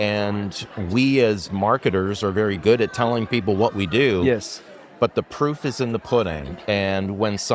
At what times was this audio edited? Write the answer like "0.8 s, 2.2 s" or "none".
none